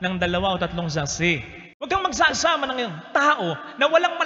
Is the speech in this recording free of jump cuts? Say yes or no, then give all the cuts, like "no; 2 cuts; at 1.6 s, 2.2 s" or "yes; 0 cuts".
no; 1 cut; at 1.6 s